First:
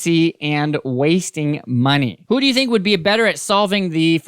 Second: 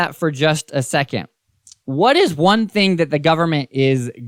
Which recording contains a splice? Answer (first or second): first